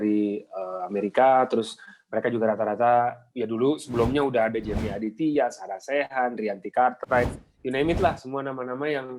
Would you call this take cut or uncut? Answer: uncut